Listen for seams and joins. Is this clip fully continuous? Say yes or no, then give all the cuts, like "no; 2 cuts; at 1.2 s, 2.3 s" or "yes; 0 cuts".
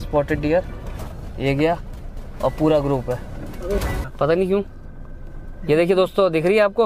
no; 1 cut; at 3.9 s